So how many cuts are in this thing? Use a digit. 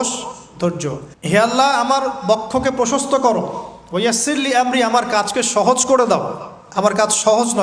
1